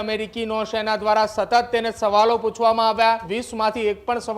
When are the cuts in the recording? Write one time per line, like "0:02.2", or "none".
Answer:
0:03.4